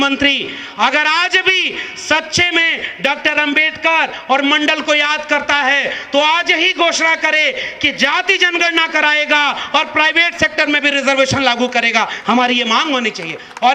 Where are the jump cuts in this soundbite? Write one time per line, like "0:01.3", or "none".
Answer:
none